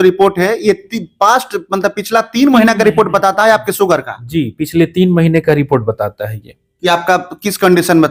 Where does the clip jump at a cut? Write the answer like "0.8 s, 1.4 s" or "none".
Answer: none